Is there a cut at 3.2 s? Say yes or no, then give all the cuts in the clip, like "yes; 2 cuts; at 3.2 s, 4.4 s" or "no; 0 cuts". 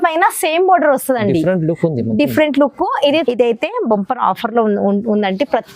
yes; 1 cut; at 3.2 s